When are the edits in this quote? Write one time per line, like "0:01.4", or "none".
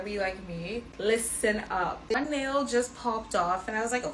0:02.1